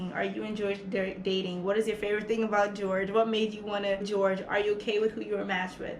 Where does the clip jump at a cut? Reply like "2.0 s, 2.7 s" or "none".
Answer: 4.1 s